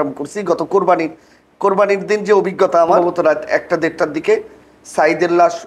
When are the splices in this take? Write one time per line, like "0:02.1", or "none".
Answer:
0:03.0